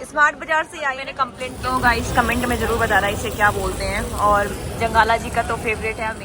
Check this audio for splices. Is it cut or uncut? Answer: cut